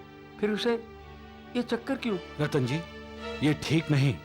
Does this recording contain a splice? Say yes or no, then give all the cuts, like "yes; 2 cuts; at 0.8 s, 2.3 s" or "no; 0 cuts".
yes; 1 cut; at 2.3 s